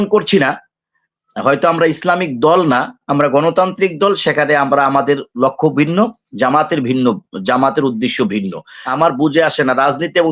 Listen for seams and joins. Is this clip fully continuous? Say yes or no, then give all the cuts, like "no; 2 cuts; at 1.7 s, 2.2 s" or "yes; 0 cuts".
no; 1 cut; at 8.8 s